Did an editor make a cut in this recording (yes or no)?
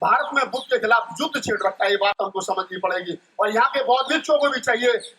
no